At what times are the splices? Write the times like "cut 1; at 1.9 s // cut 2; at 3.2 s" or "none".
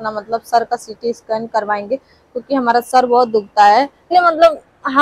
cut 1; at 4.0 s